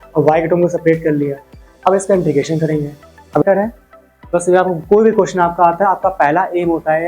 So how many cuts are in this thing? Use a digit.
1